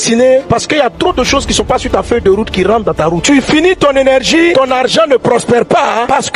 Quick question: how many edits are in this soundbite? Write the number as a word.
one